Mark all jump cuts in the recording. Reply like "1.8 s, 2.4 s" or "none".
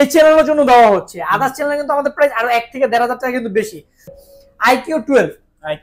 4.1 s